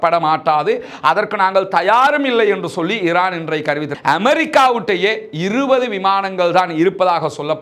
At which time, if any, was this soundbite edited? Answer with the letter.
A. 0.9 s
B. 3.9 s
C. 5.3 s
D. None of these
B